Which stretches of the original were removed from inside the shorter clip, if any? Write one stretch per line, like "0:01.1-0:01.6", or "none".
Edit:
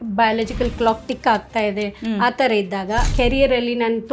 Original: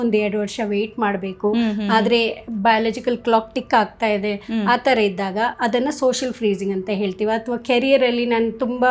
0:05.6-0:07.6